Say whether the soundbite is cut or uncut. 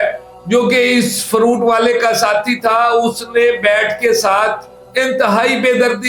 uncut